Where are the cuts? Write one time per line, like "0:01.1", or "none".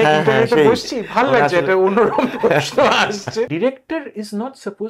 0:03.5